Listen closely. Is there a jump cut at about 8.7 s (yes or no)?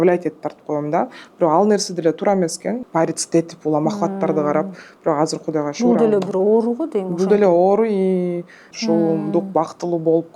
yes